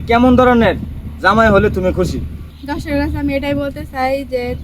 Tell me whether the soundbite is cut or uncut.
cut